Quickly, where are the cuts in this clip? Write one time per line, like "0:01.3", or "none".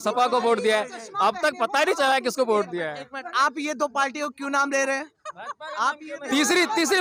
none